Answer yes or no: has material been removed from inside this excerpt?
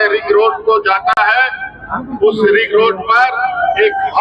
no